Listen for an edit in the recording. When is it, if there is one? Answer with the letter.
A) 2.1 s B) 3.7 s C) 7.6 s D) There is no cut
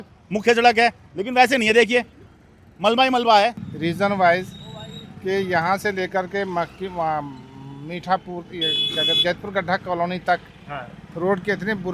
B